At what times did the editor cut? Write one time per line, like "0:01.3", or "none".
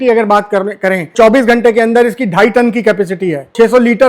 0:01.1